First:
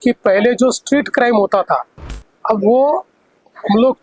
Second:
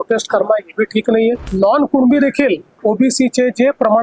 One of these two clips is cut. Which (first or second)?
second